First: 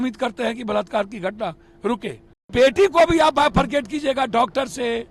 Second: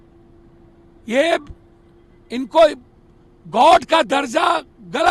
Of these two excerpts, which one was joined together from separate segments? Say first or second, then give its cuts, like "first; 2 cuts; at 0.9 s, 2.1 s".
first; 1 cut; at 2.5 s